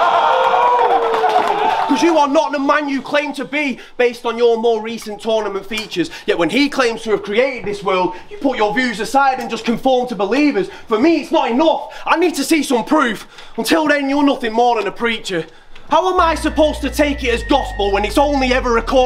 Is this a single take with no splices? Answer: no; 1 cut; at 1.9 s

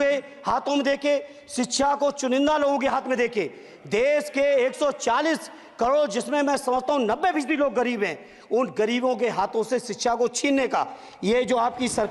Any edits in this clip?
no; 0 cuts

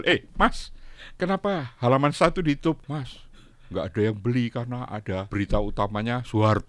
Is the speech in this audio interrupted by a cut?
yes; 2 cuts; at 2.8 s, 5.3 s

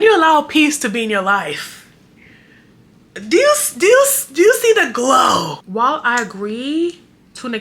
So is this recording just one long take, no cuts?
no; 1 cut; at 5.6 s

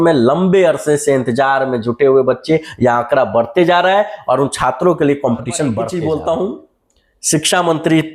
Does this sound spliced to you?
yes; 1 cut; at 5.8 s

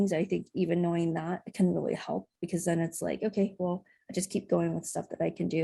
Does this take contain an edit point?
no; 0 cuts

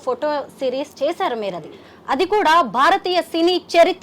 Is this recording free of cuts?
yes; 0 cuts

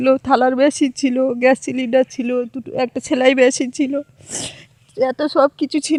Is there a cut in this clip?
no; 0 cuts

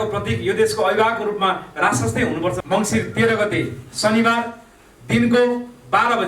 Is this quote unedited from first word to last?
no; 1 cut; at 2.6 s

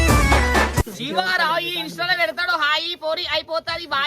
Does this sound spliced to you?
yes; 1 cut; at 0.9 s

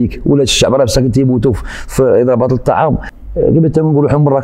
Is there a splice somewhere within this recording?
yes; 1 cut; at 3.1 s

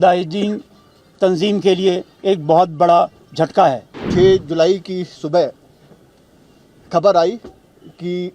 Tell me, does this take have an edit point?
yes; 1 cut; at 3.9 s

